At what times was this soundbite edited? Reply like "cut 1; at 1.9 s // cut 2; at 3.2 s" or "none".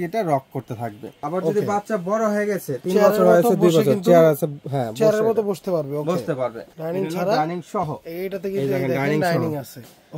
cut 1; at 1.2 s // cut 2; at 6.7 s